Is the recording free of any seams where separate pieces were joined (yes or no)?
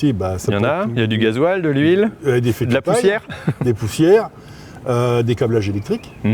yes